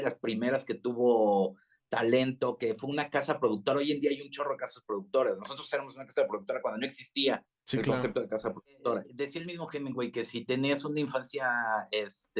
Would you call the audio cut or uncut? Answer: cut